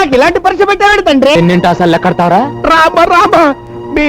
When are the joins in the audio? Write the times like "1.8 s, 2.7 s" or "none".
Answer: 1.4 s